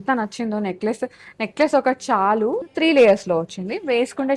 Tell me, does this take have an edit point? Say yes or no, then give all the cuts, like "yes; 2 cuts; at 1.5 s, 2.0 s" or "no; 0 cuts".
yes; 1 cut; at 2.6 s